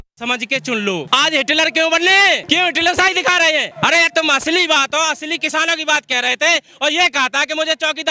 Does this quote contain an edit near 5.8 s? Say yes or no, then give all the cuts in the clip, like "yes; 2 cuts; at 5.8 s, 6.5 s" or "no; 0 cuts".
no; 3 cuts; at 1.1 s, 2.4 s, 3.7 s